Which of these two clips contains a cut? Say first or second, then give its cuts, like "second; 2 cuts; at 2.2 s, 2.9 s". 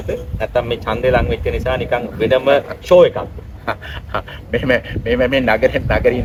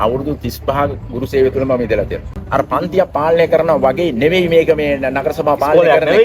second; 1 cut; at 2.3 s